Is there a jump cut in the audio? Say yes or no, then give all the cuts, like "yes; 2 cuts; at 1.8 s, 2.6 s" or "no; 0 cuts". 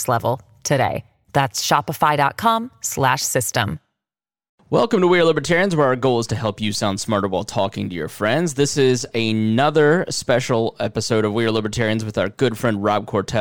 yes; 1 cut; at 4.5 s